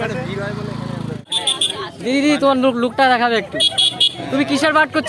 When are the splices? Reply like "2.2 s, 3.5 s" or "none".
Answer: 1.3 s